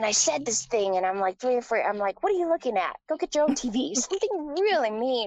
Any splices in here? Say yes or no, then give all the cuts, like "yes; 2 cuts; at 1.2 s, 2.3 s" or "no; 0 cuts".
no; 0 cuts